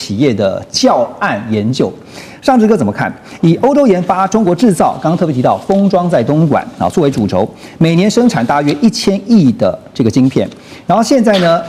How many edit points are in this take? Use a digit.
0